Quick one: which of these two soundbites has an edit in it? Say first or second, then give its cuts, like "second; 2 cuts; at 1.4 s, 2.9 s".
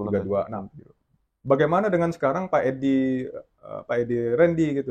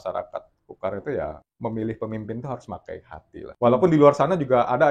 second; 2 cuts; at 1.5 s, 3.5 s